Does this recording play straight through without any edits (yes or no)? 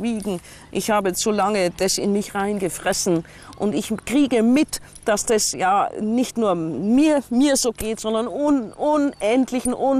no